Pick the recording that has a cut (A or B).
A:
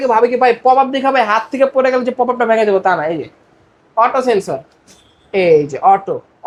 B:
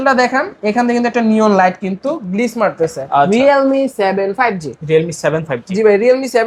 B